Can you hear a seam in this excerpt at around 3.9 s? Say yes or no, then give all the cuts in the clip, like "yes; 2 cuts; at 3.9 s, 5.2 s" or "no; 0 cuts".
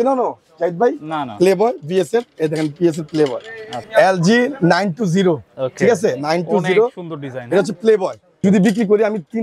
yes; 2 cuts; at 3.9 s, 8.4 s